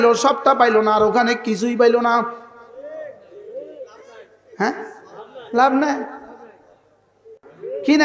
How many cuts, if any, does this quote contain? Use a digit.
0